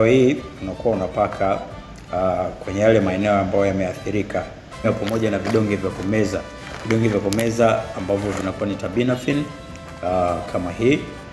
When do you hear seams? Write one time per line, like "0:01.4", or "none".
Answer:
0:04.8

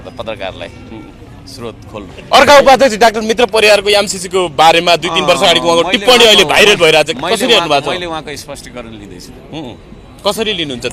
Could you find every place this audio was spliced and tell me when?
0:02.2

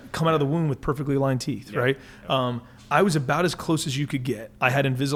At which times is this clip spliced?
none

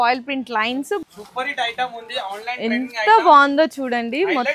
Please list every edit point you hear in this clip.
0:01.0

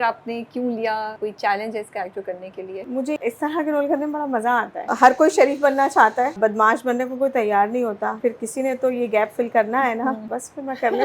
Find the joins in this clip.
0:01.2
0:03.0
0:04.8
0:06.4
0:08.2
0:10.2

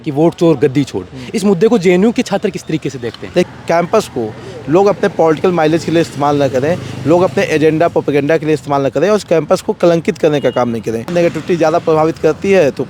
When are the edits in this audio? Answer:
0:03.5
0:11.1

